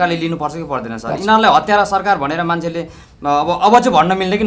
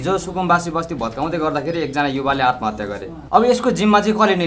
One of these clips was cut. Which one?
second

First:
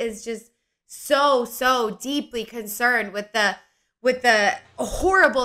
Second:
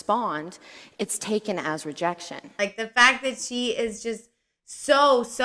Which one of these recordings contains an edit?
second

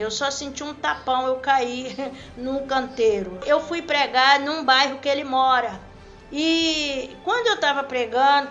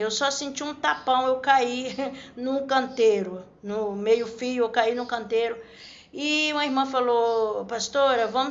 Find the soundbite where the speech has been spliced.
first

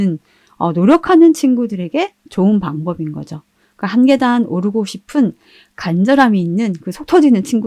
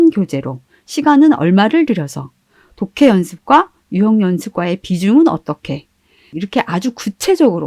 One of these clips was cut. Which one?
second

